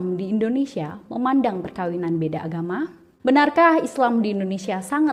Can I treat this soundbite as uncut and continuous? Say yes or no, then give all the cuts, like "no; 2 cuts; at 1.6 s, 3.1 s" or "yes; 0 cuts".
yes; 0 cuts